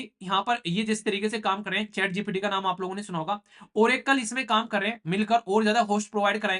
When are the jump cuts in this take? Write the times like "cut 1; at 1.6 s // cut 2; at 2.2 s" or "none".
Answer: none